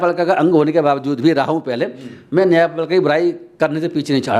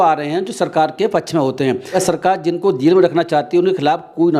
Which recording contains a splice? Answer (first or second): second